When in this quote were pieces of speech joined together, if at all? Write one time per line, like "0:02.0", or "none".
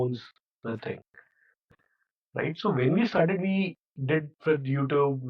0:01.7